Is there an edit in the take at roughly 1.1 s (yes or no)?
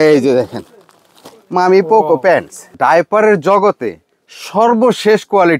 no